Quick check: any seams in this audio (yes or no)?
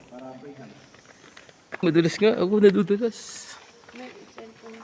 yes